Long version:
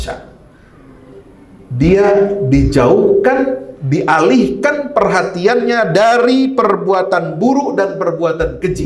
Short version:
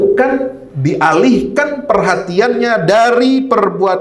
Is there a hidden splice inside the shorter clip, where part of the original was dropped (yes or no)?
no